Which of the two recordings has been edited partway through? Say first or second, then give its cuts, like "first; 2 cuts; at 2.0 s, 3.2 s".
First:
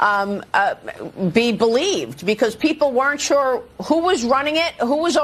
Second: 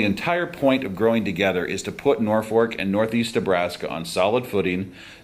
second; 1 cut; at 1.9 s